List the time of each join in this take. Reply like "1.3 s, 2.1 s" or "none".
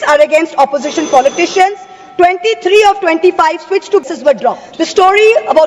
4.7 s